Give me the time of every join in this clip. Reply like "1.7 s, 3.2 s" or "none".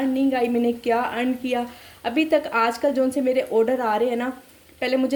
none